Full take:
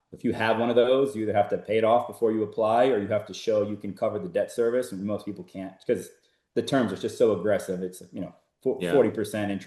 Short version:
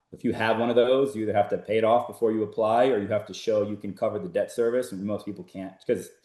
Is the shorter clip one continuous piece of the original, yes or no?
yes